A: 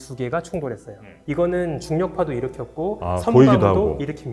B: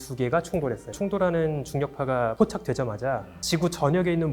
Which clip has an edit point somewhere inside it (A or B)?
B